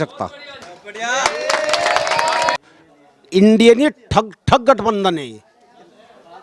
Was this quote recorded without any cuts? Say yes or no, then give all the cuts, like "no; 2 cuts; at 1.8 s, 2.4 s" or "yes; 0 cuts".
no; 1 cut; at 2.6 s